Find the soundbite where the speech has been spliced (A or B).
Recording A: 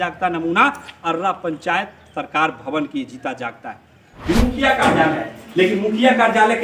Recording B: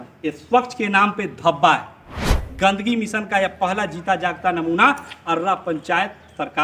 A